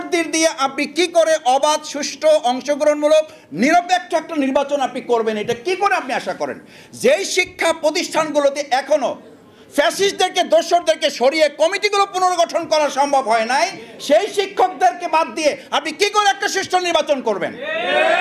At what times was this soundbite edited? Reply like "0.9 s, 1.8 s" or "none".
none